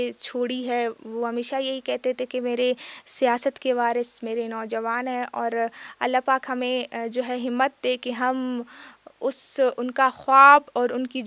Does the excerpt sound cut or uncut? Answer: uncut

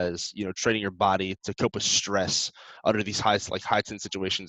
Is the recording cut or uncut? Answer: uncut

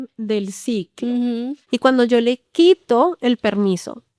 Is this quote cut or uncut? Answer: cut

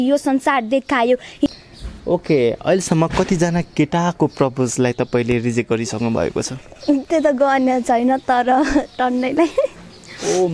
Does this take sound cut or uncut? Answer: cut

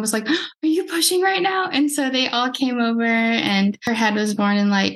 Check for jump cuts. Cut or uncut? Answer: cut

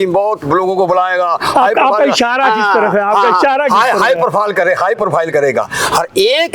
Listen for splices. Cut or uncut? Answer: uncut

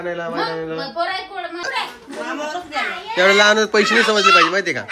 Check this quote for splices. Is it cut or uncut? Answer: cut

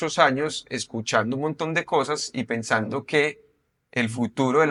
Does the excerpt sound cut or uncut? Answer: uncut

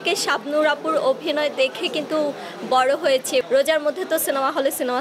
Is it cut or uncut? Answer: cut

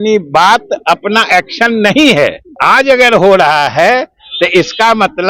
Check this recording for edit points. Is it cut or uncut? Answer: cut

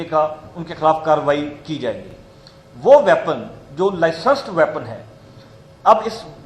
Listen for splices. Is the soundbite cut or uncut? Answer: uncut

